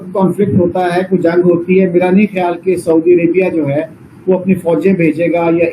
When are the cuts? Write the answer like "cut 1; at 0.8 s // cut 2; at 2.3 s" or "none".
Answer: none